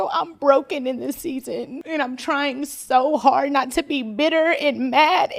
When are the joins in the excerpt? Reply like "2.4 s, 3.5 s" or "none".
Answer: 1.8 s